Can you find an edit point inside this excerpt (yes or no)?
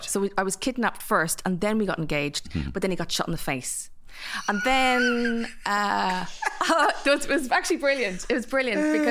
no